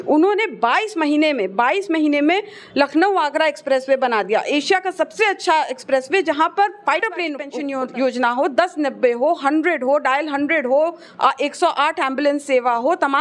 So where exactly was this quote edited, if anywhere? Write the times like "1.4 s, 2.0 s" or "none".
7.1 s

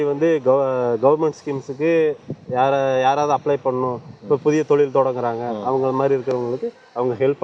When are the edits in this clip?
none

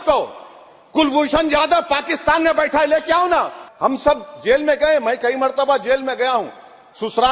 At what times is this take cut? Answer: 3.6 s

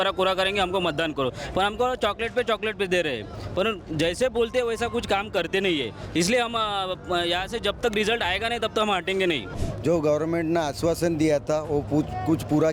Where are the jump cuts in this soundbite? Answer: 9.6 s

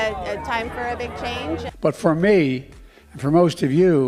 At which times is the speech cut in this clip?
1.7 s

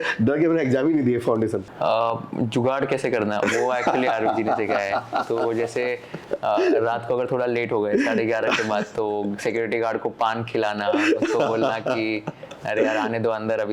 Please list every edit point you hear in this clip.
1.7 s

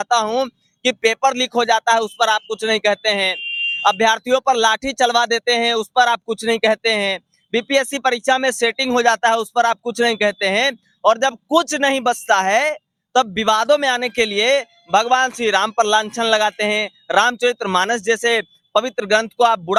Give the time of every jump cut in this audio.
none

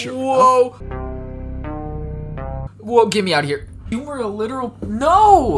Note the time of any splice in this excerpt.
2.7 s, 3.8 s

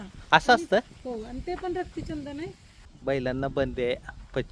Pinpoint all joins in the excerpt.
2.9 s

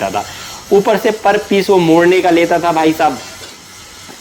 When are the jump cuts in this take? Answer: none

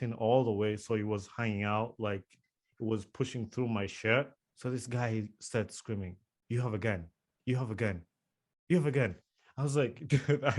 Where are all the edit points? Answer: 4.4 s

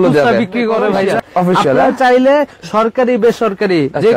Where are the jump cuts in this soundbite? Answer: 1.2 s

